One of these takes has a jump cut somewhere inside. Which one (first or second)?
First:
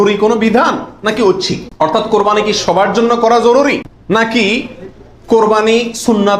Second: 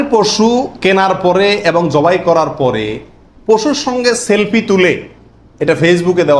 first